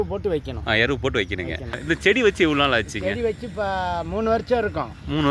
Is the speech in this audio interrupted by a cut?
yes; 1 cut; at 1.8 s

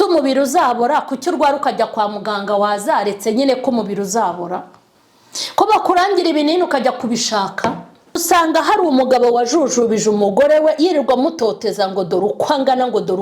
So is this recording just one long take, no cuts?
no; 1 cut; at 8.2 s

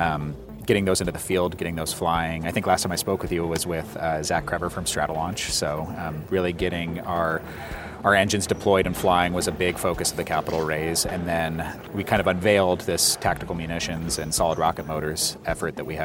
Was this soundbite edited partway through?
yes; 1 cut; at 11.8 s

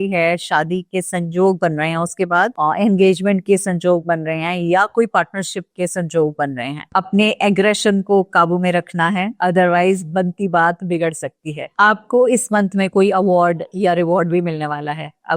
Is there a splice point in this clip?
no; 0 cuts

